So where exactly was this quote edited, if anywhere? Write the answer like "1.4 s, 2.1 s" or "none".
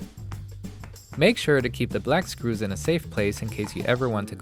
1.1 s